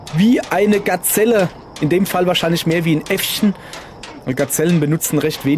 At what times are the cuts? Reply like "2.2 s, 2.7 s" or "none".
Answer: 4.4 s

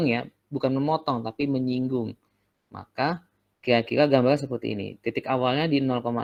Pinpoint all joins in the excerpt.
none

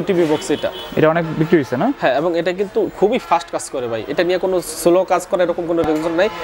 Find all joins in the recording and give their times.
none

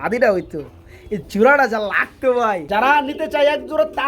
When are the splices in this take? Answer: 2.6 s

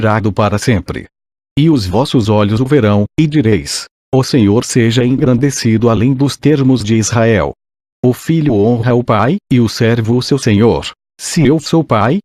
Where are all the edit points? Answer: 4.4 s

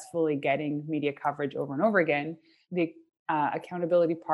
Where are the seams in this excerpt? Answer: 2.6 s

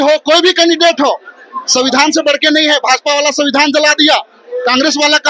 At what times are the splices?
none

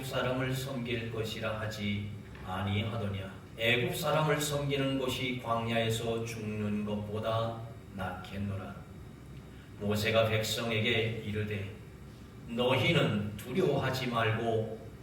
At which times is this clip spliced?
3.4 s

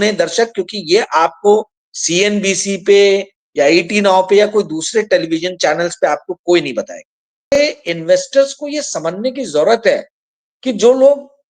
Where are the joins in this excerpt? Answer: 7.6 s

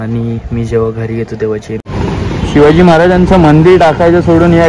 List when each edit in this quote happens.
1.8 s

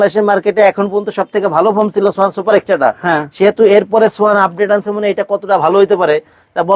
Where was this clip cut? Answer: none

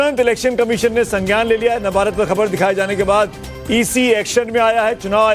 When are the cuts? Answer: 2.1 s

